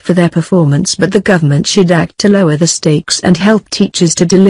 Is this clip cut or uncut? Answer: uncut